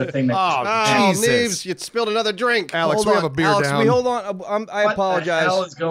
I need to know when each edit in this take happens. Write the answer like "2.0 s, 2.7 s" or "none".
none